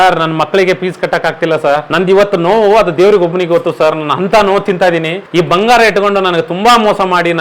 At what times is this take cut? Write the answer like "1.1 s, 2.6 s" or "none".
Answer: 1.9 s, 5.2 s